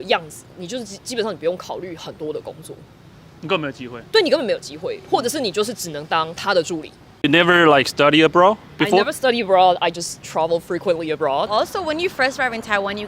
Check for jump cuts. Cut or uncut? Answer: cut